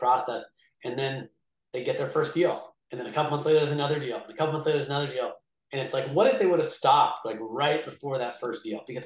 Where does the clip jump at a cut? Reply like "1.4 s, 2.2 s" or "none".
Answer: none